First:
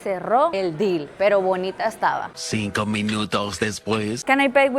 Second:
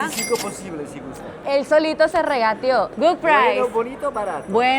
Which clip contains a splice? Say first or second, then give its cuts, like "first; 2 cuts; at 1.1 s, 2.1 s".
second; 2 cuts; at 1.4 s, 2.9 s